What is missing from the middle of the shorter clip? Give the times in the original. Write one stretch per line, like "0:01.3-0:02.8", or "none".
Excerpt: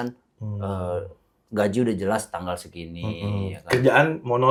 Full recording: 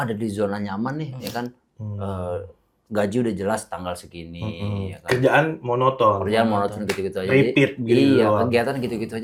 none